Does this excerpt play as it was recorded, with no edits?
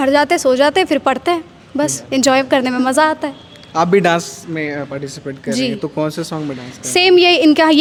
yes; 0 cuts

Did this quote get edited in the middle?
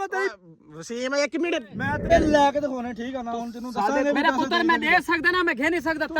yes; 1 cut; at 2.1 s

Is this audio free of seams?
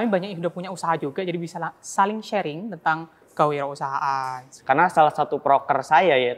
no; 1 cut; at 4.6 s

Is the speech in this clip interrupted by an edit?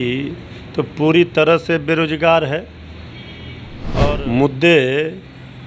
yes; 1 cut; at 4.1 s

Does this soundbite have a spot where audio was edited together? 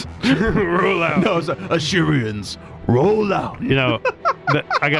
no; 0 cuts

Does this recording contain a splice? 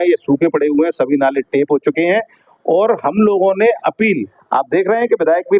yes; 1 cut; at 4.4 s

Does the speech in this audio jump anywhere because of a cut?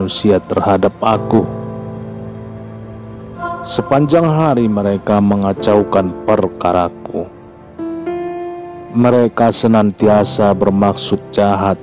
yes; 2 cuts; at 7.1 s, 8.9 s

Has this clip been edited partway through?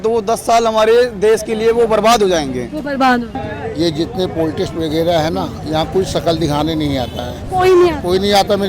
yes; 1 cut; at 3.4 s

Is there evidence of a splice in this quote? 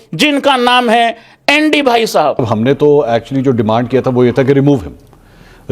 yes; 1 cut; at 2.4 s

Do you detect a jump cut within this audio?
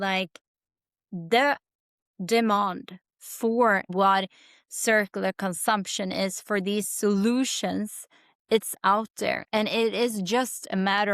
yes; 1 cut; at 3.9 s

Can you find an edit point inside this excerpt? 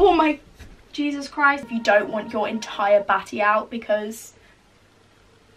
yes; 1 cut; at 1.6 s

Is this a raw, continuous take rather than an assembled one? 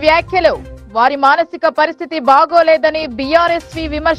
yes; 0 cuts

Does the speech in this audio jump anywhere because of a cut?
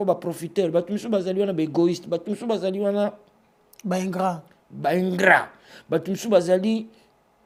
no; 0 cuts

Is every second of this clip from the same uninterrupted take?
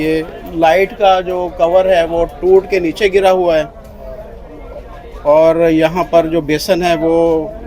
yes; 0 cuts

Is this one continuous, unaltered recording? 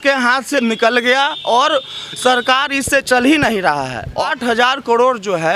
no; 1 cut; at 4.2 s

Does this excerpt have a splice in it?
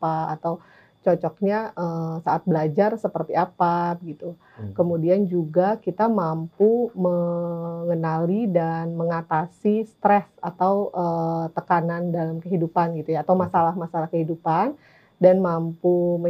no; 0 cuts

